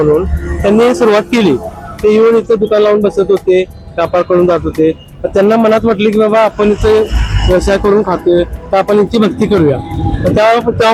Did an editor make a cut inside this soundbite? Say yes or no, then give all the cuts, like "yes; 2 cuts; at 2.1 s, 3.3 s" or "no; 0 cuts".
no; 0 cuts